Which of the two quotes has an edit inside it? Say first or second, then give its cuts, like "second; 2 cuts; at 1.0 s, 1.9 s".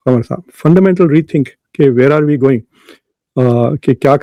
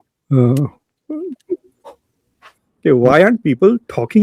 second; 1 cut; at 2.4 s